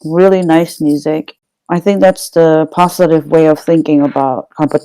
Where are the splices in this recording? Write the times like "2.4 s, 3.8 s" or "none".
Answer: 1.5 s